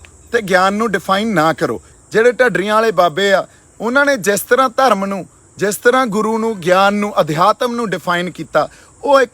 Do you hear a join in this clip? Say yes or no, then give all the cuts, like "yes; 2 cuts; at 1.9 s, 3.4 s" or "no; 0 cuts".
yes; 1 cut; at 1.9 s